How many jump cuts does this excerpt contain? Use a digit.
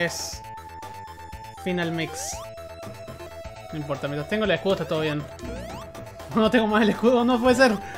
1